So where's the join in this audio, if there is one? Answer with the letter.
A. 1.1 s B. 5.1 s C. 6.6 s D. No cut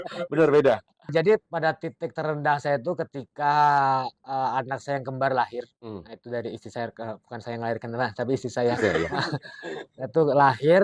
A